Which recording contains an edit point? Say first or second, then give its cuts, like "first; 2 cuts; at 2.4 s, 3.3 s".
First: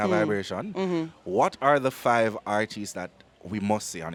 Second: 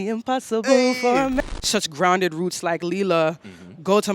second; 1 cut; at 1.4 s